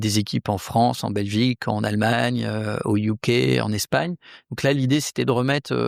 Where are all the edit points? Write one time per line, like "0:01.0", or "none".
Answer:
none